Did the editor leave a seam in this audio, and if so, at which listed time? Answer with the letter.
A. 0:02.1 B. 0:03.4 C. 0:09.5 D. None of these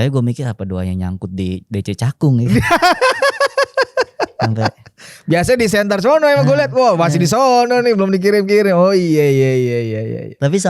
D